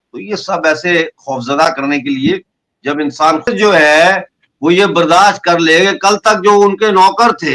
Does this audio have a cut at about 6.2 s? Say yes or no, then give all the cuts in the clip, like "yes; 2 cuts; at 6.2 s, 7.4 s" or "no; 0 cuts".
no; 1 cut; at 3.5 s